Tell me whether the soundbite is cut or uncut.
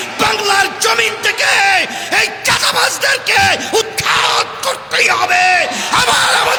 uncut